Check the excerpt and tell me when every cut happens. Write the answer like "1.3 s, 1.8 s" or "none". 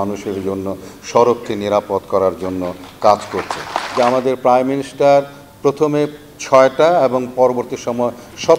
3.8 s